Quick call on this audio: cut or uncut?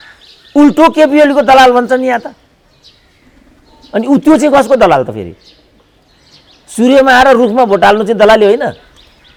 uncut